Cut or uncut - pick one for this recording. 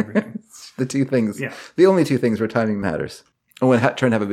cut